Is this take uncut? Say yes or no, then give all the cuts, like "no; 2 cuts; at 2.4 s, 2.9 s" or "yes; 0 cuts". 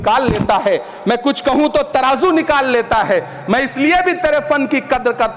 yes; 0 cuts